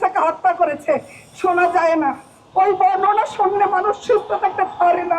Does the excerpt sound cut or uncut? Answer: uncut